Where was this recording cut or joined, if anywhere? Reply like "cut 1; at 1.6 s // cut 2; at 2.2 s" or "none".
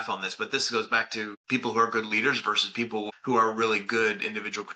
cut 1; at 1.3 s // cut 2; at 3.1 s